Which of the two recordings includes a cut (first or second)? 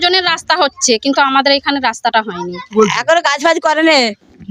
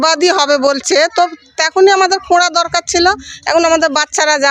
first